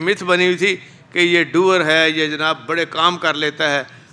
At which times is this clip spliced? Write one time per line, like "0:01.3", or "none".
none